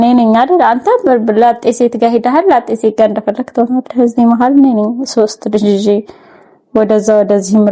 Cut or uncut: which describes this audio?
uncut